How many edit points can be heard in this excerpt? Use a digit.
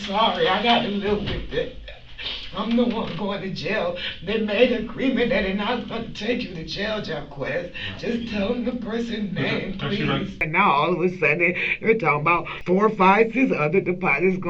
2